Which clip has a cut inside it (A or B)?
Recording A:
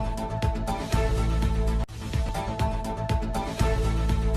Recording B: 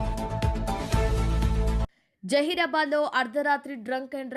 B